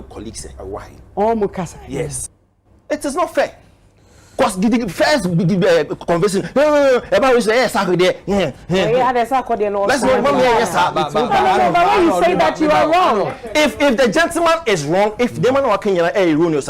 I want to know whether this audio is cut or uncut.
cut